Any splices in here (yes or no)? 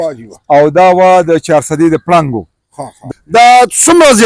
yes